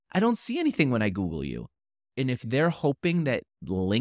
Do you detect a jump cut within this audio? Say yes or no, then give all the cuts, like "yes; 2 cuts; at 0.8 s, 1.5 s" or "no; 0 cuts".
yes; 1 cut; at 2.1 s